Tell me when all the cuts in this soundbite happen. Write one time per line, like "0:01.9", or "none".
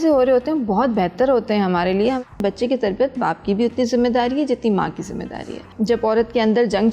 0:02.3
0:05.6